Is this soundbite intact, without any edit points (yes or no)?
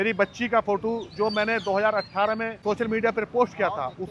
no